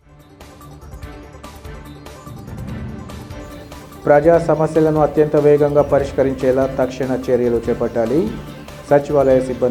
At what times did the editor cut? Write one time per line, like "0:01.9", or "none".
none